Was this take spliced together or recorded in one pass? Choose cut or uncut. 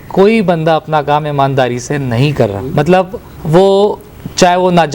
cut